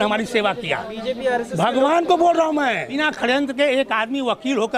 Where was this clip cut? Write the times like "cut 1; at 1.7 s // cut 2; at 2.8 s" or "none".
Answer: cut 1; at 3.1 s